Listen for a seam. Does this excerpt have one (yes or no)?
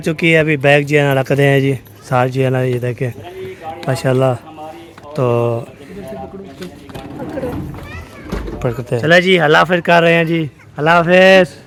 no